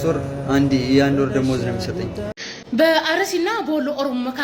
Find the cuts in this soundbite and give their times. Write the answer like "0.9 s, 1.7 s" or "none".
2.3 s